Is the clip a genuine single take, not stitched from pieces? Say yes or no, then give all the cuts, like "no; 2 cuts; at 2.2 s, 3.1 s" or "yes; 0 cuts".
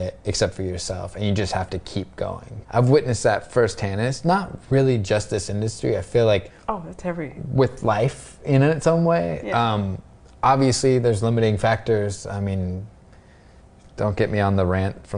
no; 2 cuts; at 2.5 s, 6.5 s